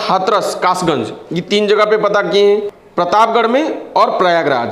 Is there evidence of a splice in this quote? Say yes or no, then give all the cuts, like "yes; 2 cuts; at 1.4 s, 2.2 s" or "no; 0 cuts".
yes; 1 cut; at 2.8 s